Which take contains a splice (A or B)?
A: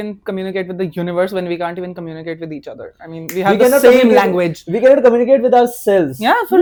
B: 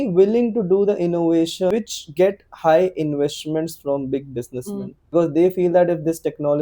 B